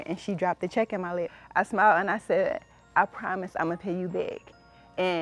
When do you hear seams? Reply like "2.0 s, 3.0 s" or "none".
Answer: 1.4 s